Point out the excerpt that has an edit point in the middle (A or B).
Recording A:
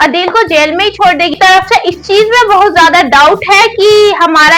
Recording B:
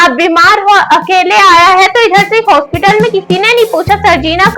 A